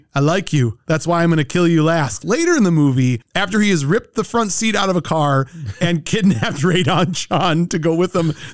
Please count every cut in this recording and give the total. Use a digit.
1